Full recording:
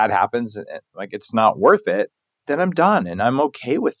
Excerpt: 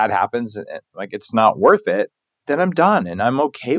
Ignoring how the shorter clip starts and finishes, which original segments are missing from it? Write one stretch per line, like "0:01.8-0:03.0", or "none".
none